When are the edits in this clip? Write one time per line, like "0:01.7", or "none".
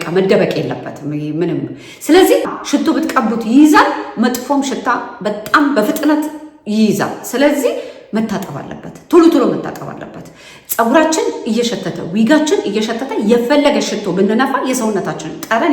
0:02.6